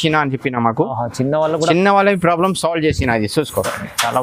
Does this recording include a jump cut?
no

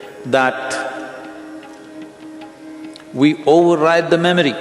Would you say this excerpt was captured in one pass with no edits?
yes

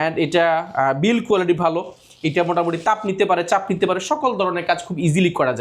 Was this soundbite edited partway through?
no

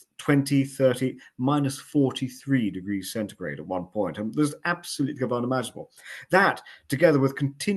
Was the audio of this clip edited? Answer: no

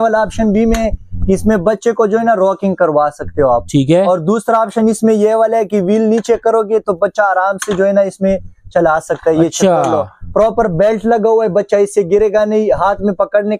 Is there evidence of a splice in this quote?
no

